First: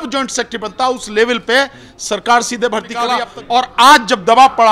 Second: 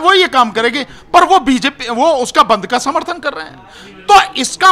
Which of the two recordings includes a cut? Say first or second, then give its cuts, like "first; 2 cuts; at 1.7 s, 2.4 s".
first; 1 cut; at 3.2 s